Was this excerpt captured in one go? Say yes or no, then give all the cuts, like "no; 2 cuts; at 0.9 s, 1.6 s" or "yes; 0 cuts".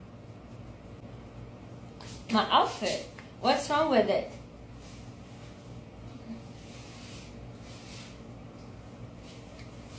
no; 1 cut; at 1.0 s